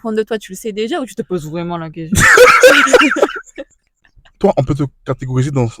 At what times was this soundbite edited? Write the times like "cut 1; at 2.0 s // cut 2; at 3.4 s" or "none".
cut 1; at 4.4 s